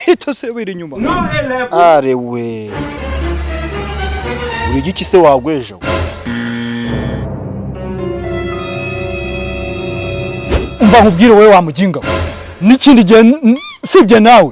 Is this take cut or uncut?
uncut